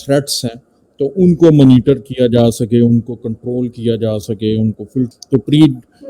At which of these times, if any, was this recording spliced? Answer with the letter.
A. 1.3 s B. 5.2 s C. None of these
B